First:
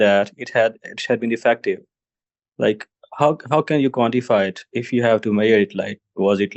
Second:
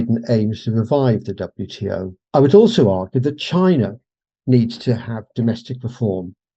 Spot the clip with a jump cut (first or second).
second